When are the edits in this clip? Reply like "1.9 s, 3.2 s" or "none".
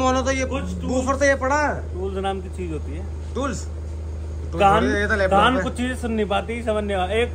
none